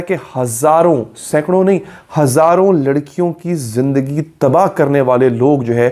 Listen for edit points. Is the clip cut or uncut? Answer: uncut